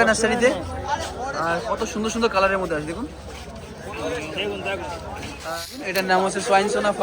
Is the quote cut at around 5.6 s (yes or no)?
yes